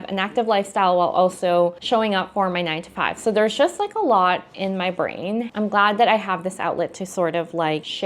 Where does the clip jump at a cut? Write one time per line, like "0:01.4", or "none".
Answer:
none